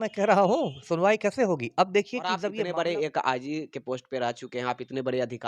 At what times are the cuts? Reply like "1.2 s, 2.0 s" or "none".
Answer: 2.6 s